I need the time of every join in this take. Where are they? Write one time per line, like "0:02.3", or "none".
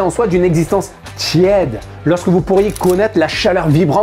none